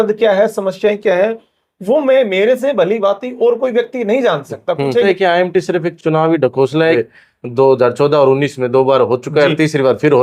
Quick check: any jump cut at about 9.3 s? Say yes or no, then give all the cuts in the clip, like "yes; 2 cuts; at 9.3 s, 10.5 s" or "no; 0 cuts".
no; 2 cuts; at 5.1 s, 7.0 s